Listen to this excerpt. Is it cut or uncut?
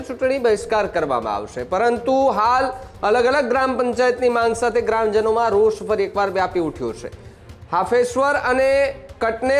uncut